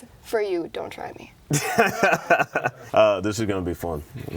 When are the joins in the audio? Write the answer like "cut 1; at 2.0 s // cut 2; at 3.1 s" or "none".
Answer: cut 1; at 2.8 s